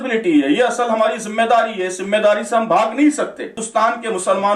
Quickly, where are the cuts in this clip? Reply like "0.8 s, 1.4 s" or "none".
3.6 s